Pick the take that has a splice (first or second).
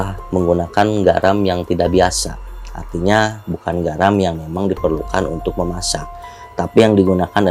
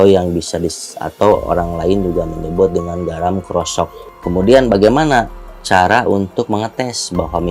second